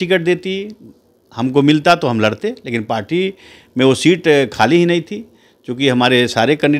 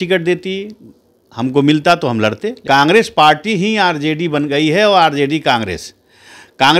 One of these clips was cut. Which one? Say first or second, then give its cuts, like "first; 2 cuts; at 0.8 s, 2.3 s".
second; 1 cut; at 2.6 s